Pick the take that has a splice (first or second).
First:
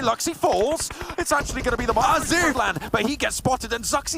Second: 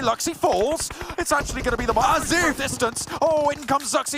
first